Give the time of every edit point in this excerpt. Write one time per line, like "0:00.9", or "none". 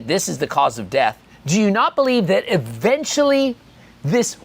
0:01.3